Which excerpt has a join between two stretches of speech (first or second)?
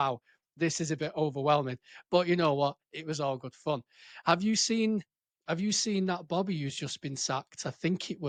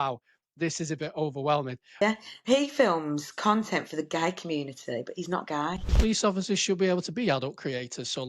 second